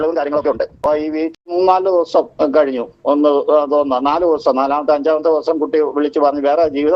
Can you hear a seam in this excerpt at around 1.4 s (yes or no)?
yes